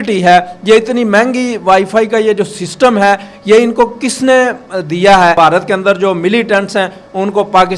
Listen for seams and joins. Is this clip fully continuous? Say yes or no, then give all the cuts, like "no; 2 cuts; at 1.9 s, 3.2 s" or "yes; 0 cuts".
no; 1 cut; at 5.3 s